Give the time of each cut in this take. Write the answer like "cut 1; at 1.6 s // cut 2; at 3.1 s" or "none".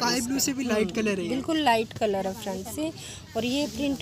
none